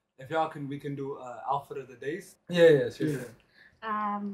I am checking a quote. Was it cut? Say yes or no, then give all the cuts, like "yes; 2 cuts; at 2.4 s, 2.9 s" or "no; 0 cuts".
yes; 1 cut; at 2.3 s